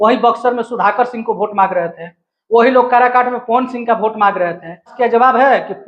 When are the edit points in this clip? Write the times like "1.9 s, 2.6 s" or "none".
4.9 s